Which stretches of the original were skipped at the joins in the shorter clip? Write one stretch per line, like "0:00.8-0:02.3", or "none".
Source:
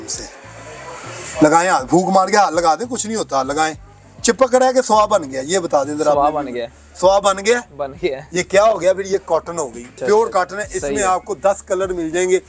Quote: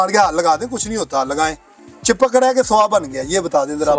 none